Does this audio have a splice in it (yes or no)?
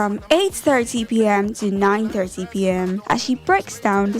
yes